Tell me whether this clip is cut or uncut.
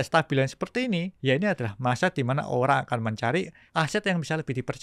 cut